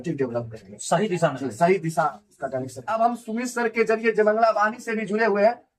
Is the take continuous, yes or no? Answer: no